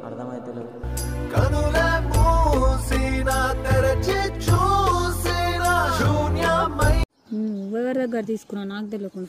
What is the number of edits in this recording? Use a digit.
0